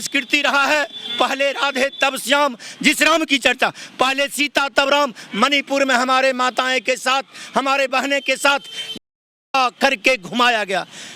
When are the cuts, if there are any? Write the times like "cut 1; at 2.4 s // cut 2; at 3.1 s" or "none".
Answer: none